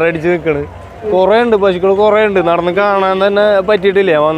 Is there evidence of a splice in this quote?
yes; 1 cut; at 1.1 s

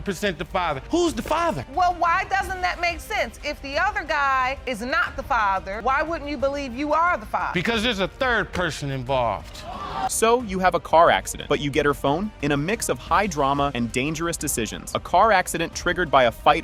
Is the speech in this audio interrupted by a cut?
no; 0 cuts

